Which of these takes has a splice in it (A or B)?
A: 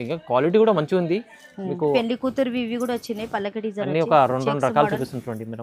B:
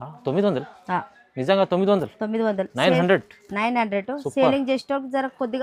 A